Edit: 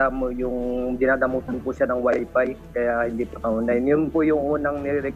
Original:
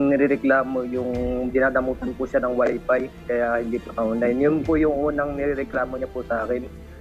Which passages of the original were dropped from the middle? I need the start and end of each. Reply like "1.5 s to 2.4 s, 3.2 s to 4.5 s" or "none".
none